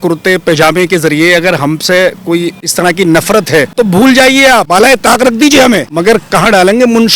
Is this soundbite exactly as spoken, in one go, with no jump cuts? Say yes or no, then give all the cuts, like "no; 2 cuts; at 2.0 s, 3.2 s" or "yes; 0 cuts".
no; 4 cuts; at 2.6 s, 3.7 s, 4.7 s, 5.9 s